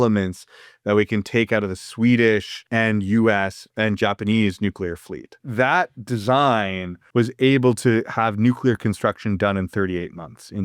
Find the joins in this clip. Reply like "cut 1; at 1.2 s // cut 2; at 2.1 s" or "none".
cut 1; at 2.6 s // cut 2; at 3.7 s // cut 3; at 5.4 s // cut 4; at 7.0 s